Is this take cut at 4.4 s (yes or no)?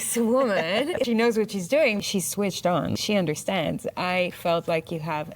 no